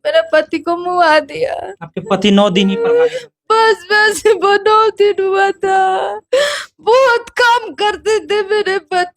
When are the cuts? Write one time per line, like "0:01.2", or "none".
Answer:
none